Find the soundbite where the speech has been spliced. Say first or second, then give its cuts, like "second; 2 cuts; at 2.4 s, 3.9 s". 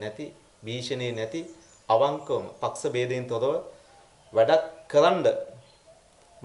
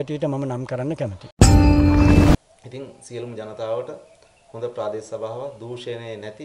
second; 2 cuts; at 1.2 s, 2.3 s